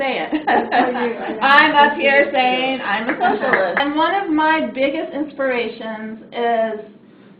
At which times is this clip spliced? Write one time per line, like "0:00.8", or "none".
0:03.8